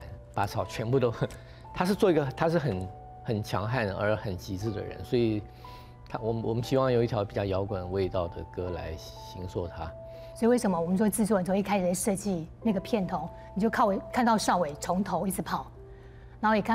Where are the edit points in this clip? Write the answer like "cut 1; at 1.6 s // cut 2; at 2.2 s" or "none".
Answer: cut 1; at 10.2 s